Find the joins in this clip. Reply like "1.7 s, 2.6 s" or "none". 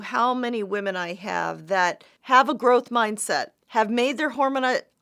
2.1 s, 3.6 s